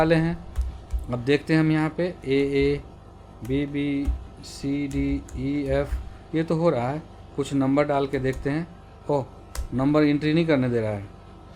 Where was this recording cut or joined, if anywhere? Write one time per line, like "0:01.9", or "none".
none